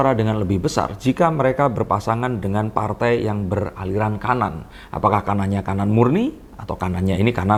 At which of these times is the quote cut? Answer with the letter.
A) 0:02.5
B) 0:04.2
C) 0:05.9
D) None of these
D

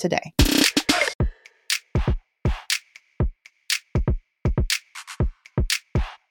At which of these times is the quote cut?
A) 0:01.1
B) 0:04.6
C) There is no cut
A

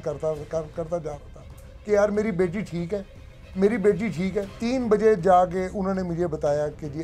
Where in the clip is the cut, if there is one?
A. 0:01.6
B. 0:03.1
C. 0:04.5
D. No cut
C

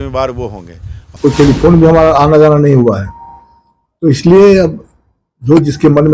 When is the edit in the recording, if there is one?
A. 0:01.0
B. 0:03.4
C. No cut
A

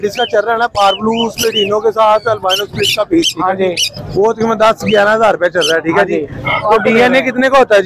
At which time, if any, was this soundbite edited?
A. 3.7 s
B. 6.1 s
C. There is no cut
C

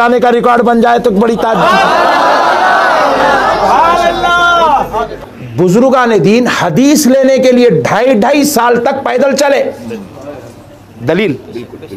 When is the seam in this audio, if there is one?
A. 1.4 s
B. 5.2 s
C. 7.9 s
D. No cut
B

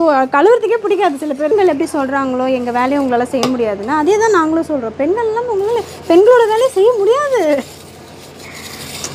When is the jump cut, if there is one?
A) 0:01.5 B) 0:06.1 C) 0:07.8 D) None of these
A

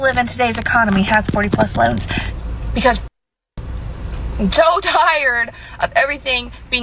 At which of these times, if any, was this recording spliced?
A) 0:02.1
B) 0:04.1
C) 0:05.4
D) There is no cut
A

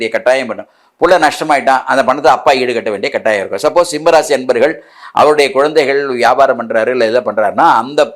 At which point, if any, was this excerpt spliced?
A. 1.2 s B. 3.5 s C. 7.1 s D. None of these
D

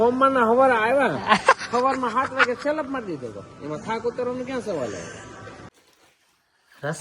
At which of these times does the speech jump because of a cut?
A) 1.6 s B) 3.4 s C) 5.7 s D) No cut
C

